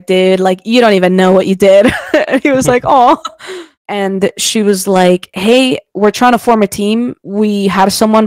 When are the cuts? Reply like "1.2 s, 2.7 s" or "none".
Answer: 3.7 s